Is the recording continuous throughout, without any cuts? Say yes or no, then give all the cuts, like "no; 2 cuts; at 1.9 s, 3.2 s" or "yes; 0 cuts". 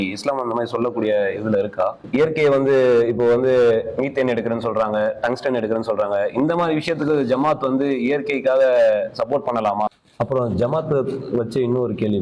no; 2 cuts; at 2.0 s, 10.0 s